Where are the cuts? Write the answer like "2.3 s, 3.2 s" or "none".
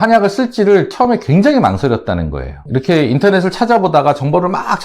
2.6 s